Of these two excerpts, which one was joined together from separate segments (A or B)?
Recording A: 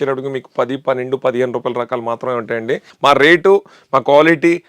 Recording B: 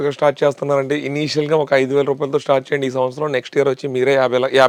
A